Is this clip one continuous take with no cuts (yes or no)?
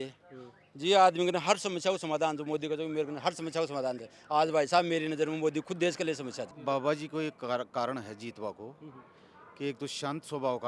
no